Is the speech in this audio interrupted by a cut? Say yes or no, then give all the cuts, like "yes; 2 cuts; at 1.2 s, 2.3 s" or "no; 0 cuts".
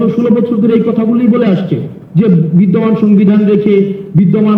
no; 0 cuts